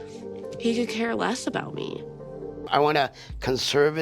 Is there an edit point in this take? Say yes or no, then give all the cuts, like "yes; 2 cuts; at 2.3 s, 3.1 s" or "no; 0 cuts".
yes; 1 cut; at 2.6 s